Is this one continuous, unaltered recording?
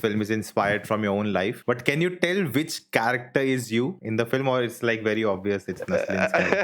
no; 1 cut; at 1.6 s

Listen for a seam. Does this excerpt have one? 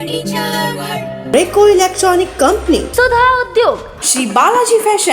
yes; 1 cut; at 1.2 s

